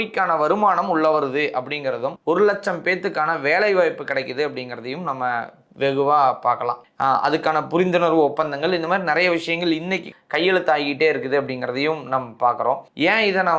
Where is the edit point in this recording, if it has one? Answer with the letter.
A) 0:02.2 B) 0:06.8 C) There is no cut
C